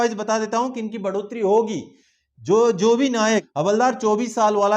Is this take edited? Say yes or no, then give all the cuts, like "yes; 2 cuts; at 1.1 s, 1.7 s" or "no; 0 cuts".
yes; 1 cut; at 3.5 s